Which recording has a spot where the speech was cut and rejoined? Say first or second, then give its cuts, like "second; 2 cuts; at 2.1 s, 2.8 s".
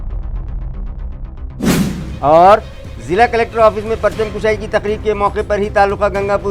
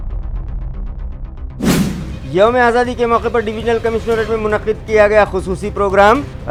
first; 1 cut; at 2.0 s